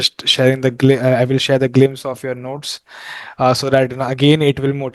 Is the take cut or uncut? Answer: uncut